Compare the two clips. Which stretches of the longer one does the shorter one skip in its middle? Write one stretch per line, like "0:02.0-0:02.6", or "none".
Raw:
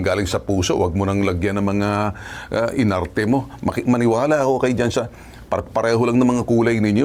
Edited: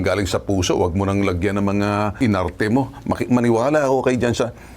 0:02.2-0:02.7